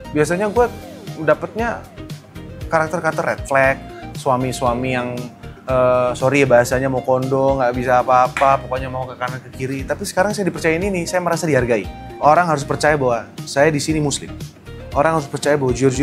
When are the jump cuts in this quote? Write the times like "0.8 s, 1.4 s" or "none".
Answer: 12.0 s